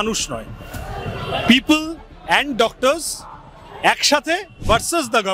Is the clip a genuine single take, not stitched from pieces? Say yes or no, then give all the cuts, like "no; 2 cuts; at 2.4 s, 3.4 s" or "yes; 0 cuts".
yes; 0 cuts